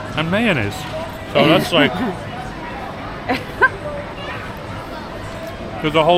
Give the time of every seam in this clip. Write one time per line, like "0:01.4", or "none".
none